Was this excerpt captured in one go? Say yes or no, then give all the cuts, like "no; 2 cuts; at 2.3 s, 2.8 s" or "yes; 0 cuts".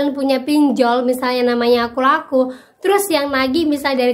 yes; 0 cuts